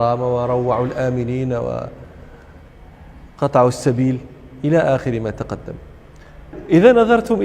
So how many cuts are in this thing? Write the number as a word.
one